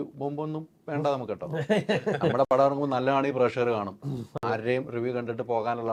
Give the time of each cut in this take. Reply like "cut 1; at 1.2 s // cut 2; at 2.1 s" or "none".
none